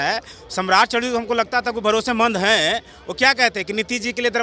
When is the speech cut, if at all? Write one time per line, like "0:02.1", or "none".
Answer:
none